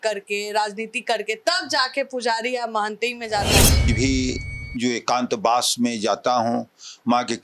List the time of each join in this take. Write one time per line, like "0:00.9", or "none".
0:03.9